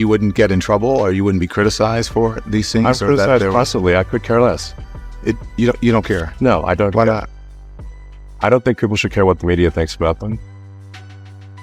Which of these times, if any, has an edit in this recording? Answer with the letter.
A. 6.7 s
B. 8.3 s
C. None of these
C